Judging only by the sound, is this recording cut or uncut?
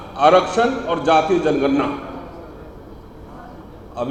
uncut